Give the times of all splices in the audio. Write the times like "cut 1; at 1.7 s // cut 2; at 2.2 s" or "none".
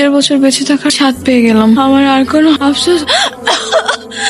none